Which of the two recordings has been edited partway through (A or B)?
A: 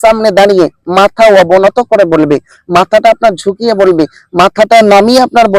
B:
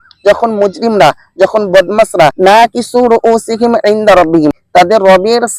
B